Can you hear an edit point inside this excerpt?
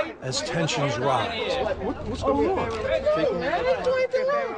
yes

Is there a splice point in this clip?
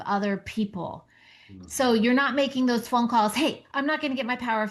no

